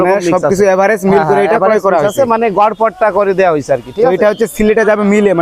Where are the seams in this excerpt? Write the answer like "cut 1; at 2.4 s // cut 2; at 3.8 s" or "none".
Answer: none